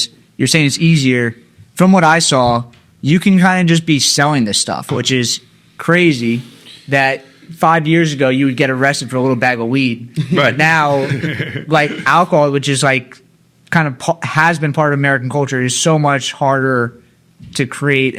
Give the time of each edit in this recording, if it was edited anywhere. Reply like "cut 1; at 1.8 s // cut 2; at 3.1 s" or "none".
none

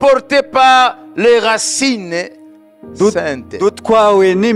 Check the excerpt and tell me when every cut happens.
none

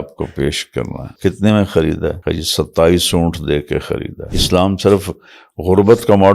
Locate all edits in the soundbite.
cut 1; at 1.0 s // cut 2; at 2.2 s // cut 3; at 4.3 s

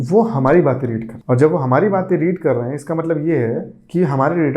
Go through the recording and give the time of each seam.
cut 1; at 1.1 s

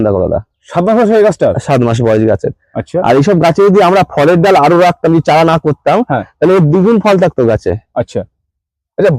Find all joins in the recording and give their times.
none

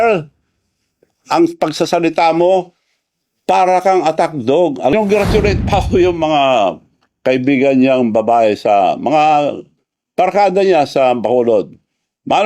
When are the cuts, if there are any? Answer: cut 1; at 4.9 s

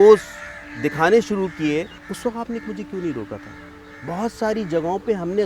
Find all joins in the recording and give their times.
cut 1; at 2.0 s

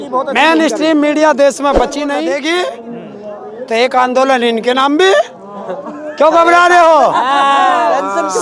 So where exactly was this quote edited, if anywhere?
cut 1; at 2.2 s

